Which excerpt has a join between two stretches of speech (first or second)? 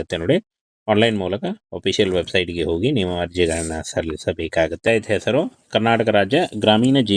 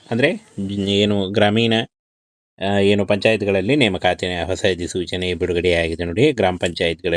first